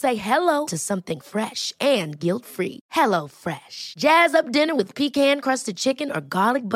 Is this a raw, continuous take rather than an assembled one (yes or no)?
yes